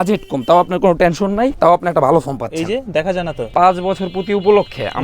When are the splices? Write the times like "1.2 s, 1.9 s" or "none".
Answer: 1.5 s, 3.4 s